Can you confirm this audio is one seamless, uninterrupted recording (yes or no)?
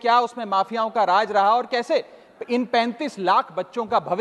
yes